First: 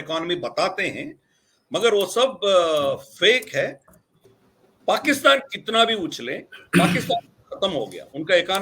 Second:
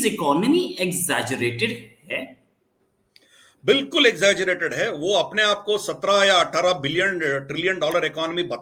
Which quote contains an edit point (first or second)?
first